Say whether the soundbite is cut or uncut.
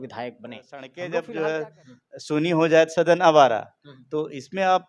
cut